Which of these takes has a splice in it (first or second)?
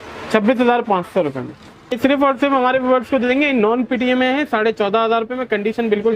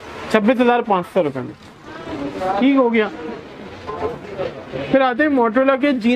first